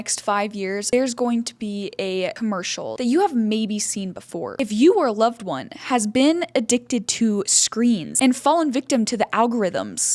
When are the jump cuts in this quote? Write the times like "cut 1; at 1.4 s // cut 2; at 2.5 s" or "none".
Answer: cut 1; at 0.8 s // cut 2; at 2.4 s // cut 3; at 4.4 s